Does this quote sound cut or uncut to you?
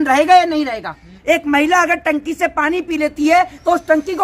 cut